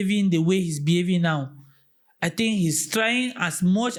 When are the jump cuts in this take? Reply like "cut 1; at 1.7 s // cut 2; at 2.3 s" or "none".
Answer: none